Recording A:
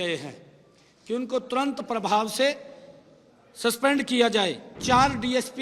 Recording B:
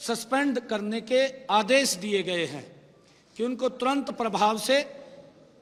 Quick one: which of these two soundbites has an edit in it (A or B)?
A